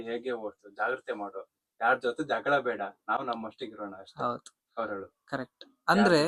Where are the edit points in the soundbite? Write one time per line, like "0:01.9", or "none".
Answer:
none